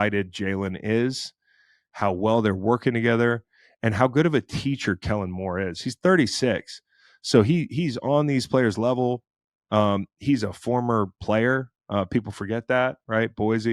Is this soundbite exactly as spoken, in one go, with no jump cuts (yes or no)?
yes